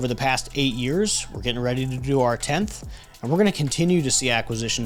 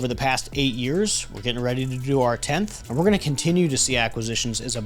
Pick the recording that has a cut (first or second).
second